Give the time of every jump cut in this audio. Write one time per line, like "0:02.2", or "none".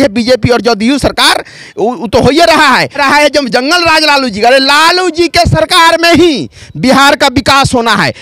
0:03.0